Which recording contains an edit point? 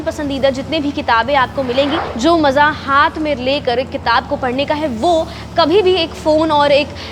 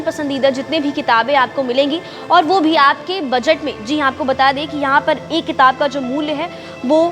first; 1 cut; at 2.1 s

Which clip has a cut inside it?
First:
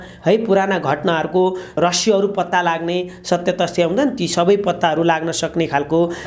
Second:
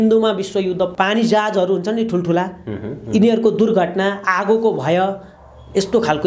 second; 1 cut; at 0.9 s

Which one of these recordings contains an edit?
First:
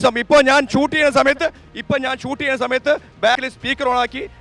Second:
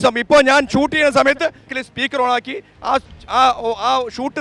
second; 1 cut; at 1.8 s

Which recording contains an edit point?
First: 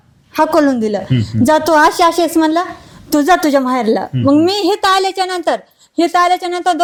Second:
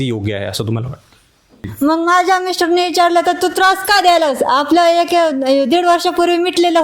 second; 1 cut; at 1.7 s

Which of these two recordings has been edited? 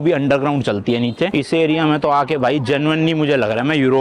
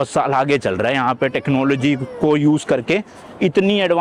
first; 1 cut; at 1.3 s

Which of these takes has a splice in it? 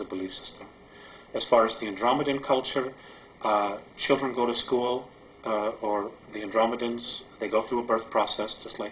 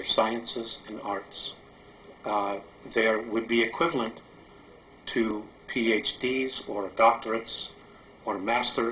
first; 1 cut; at 2.6 s

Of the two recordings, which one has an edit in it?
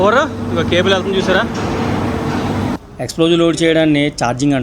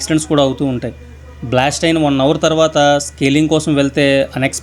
first; 1 cut; at 2.7 s

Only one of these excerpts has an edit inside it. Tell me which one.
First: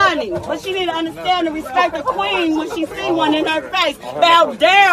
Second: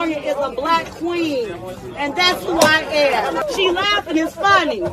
second; 1 cut; at 3.4 s

